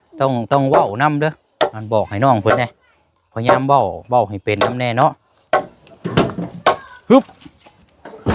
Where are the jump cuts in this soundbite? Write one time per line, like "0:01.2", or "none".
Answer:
0:05.8